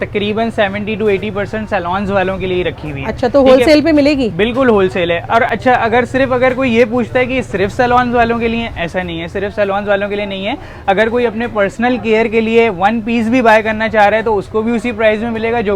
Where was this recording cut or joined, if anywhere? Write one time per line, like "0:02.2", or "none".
none